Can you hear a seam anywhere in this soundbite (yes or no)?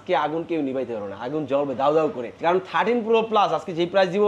yes